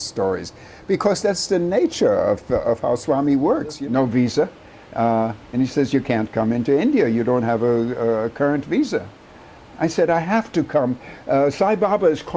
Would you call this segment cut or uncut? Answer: cut